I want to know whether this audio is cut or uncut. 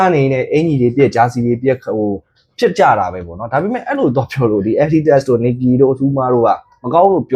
uncut